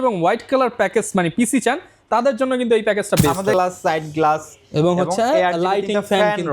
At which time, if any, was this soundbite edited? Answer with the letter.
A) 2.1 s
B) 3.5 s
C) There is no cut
B